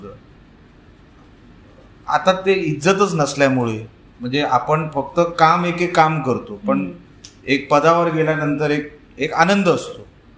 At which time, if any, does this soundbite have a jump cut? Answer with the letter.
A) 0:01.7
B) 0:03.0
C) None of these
C